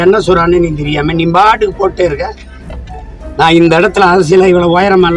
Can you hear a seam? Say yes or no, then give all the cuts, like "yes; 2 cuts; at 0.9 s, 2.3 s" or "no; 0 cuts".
no; 0 cuts